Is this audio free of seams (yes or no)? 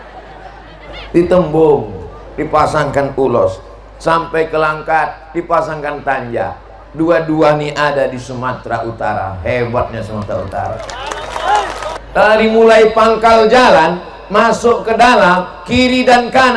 no